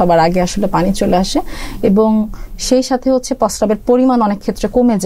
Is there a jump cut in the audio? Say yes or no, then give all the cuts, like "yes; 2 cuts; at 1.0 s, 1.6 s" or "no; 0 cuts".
no; 0 cuts